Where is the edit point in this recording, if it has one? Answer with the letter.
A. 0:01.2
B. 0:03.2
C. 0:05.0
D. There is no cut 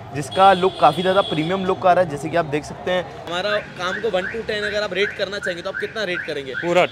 B